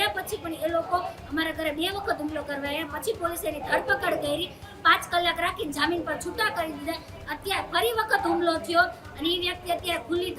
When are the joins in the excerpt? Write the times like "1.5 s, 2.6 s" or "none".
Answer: none